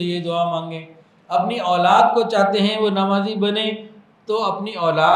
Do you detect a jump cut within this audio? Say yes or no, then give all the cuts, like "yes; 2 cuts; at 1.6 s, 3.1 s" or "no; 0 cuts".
no; 0 cuts